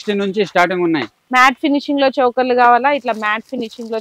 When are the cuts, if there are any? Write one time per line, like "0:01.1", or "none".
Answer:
0:01.2